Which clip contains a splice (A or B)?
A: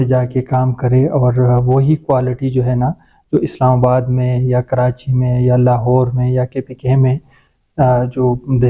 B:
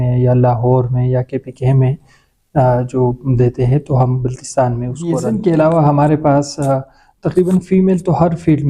B